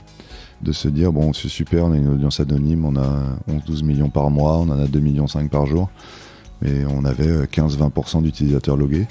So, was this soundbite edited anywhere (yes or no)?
no